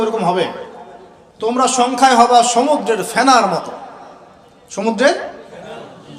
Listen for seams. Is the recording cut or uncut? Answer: uncut